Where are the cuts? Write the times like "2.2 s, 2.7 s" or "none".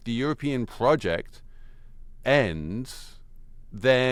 none